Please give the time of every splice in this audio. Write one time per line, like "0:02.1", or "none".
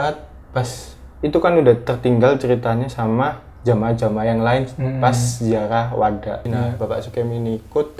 0:06.5